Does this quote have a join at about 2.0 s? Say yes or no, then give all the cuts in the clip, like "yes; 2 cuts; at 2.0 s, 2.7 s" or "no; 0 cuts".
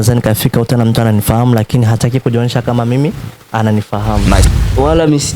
no; 1 cut; at 4.4 s